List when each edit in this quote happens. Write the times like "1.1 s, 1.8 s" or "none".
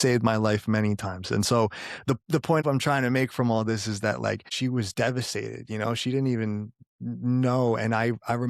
2.6 s, 4.5 s